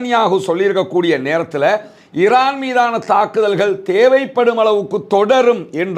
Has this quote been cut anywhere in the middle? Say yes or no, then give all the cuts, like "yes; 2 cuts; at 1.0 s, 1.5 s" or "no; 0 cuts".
no; 0 cuts